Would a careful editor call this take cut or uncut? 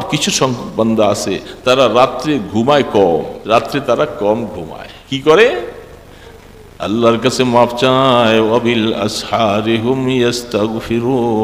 cut